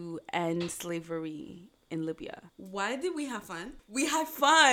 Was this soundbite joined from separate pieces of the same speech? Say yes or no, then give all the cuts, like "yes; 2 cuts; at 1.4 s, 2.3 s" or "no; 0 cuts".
no; 0 cuts